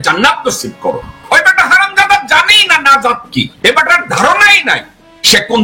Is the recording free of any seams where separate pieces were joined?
no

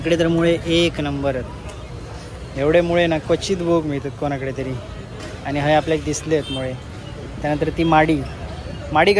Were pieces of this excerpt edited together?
no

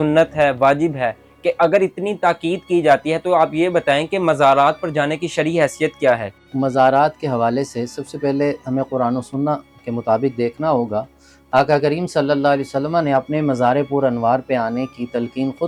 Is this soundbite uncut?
yes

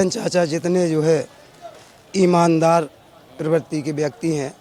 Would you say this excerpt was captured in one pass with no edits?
yes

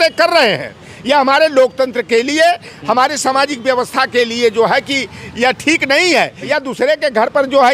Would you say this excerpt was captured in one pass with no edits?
no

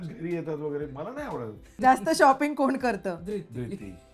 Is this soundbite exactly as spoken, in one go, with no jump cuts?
no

